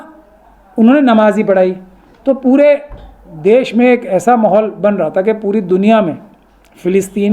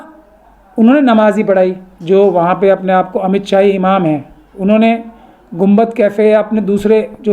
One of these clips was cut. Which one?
second; 1 cut; at 1.9 s

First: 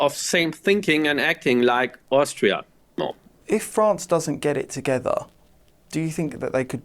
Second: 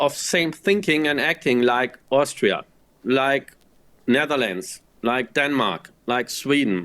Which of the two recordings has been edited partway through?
first; 1 cut; at 3.0 s

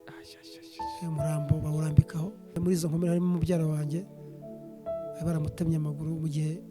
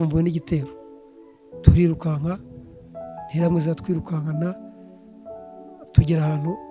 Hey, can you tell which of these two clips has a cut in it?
first; 1 cut; at 2.5 s

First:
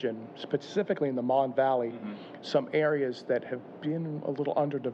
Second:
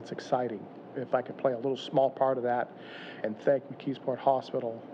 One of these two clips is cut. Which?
second; 2 cuts; at 0.9 s, 3.2 s

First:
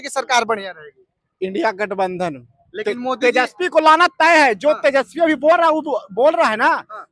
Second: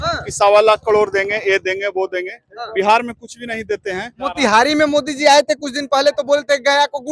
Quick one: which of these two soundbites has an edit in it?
second; 1 cut; at 4.2 s

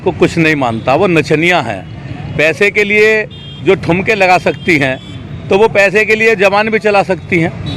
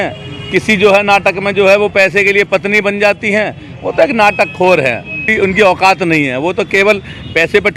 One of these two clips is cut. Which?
second; 1 cut; at 5.3 s

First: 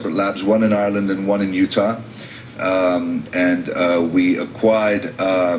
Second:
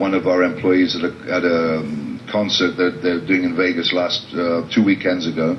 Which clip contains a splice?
second; 1 cut; at 3.9 s

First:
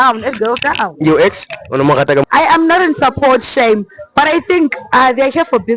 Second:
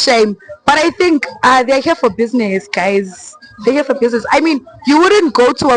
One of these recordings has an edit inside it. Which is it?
first; 1 cut; at 2.3 s

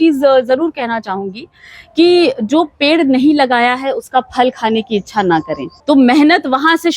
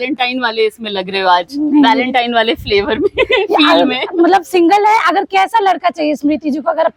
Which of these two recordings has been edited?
first; 1 cut; at 5.6 s

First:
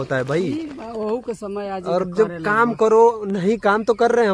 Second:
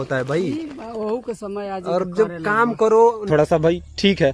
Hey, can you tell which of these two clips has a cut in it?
second; 1 cut; at 3.2 s

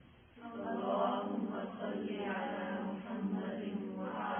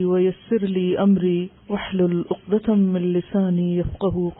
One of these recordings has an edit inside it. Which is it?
second; 1 cut; at 1.6 s

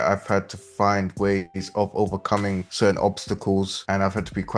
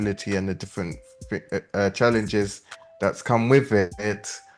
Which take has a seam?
first; 2 cuts; at 2.7 s, 3.8 s

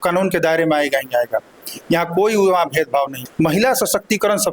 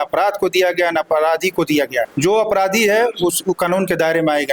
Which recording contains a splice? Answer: first; 1 cut; at 3.2 s

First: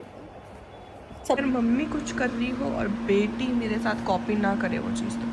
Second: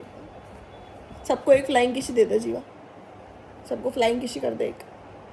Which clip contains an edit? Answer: first; 1 cut; at 1.4 s

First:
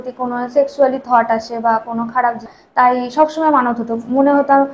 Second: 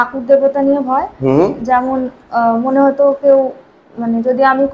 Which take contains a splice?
first; 1 cut; at 2.6 s

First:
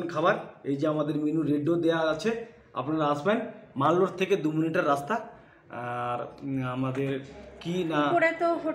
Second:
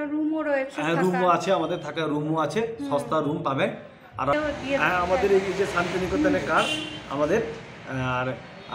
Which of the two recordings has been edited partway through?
second; 1 cut; at 4.4 s

